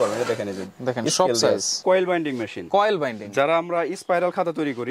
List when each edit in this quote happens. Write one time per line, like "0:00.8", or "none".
0:01.8